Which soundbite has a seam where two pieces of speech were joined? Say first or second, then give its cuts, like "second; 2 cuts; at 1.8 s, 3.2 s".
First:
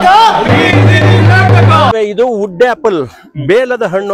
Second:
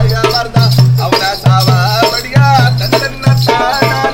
first; 1 cut; at 1.9 s